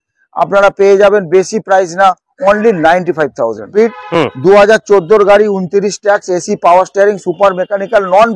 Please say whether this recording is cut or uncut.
cut